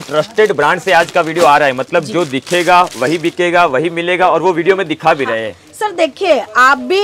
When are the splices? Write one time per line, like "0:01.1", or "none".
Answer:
none